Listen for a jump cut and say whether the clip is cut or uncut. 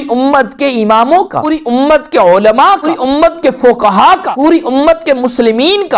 cut